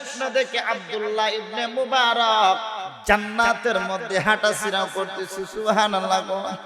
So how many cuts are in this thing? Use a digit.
1